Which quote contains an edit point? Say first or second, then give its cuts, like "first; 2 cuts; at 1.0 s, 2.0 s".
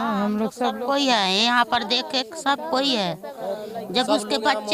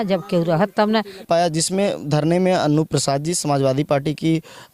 second; 1 cut; at 1.2 s